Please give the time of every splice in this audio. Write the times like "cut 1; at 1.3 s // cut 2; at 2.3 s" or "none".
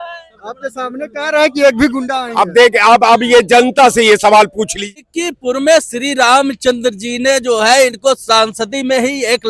cut 1; at 4.8 s